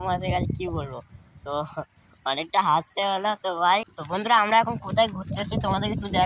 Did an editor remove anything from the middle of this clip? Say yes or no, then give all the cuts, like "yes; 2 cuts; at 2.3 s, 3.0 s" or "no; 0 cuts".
yes; 1 cut; at 4.0 s